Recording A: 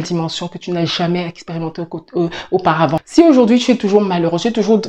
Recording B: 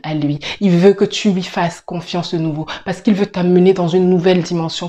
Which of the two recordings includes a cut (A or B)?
A